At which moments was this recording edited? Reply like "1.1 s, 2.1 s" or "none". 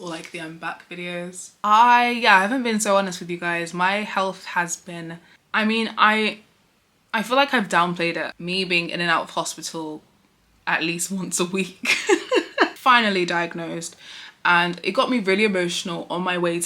1.5 s, 8.3 s, 12.8 s